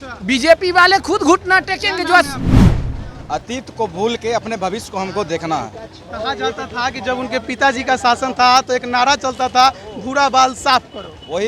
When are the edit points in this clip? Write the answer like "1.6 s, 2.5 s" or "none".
2.6 s

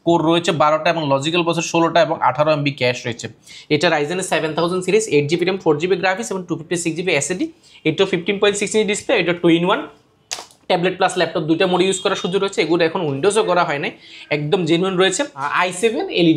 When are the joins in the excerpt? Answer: 3.4 s, 15.5 s

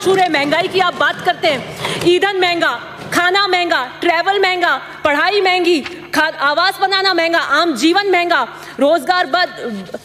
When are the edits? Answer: none

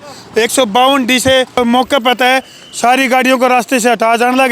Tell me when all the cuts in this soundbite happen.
1.6 s

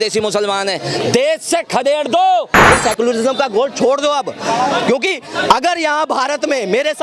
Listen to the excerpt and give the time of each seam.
2.7 s

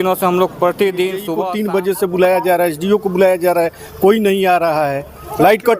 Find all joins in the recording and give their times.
1.3 s

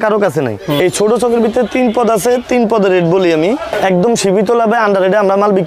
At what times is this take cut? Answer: 0.8 s, 3.7 s

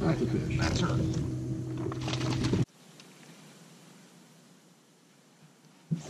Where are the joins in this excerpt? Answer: 2.7 s

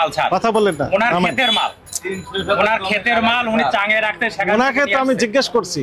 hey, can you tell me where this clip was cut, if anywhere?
none

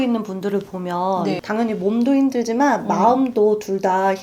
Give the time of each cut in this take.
1.4 s

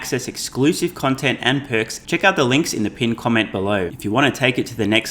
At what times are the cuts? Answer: 2.0 s, 3.9 s

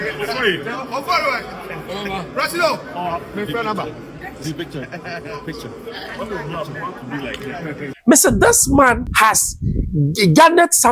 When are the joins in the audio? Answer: 7.9 s, 9.1 s

